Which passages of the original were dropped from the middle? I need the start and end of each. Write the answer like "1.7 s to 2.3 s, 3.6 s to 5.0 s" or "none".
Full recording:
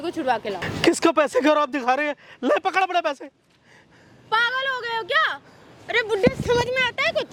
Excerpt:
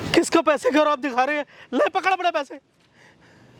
none